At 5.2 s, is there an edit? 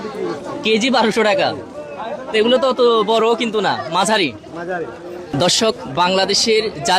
yes; 1 cut; at 5.2 s

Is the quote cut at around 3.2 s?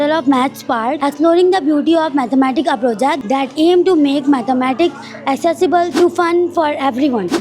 yes; 2 cuts; at 1.0 s, 3.2 s

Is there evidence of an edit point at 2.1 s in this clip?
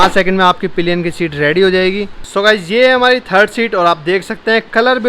yes; 1 cut; at 2.1 s

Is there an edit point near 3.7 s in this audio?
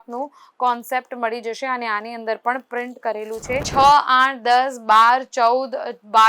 yes; 1 cut; at 3.7 s

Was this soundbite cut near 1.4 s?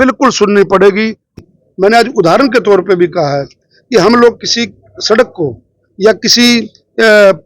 yes; 1 cut; at 1.4 s

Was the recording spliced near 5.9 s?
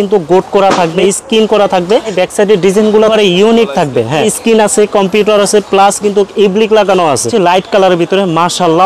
no; 5 cuts; at 1.0 s, 2.1 s, 3.1 s, 4.3 s, 7.3 s

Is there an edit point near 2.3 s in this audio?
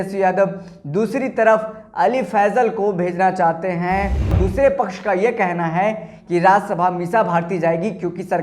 no; 1 cut; at 4.4 s

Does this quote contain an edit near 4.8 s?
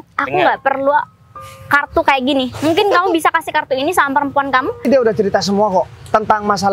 yes; 1 cut; at 4.8 s

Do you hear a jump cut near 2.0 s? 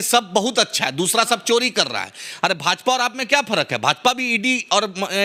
no; 0 cuts

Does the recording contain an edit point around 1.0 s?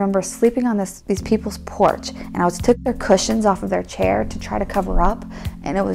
yes; 1 cut; at 1.0 s

